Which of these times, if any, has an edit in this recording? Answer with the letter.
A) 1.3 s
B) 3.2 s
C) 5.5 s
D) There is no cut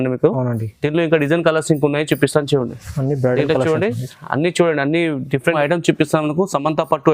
C